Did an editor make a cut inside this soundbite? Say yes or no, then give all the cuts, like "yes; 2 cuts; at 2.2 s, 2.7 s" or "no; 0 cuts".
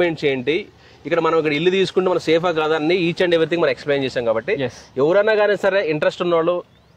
no; 0 cuts